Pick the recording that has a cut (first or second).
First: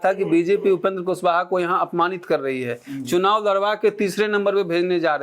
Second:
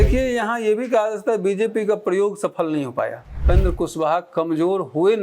second